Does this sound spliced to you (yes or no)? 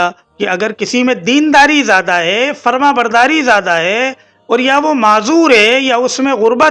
no